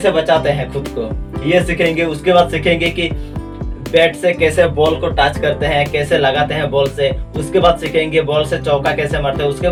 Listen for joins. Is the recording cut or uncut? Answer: uncut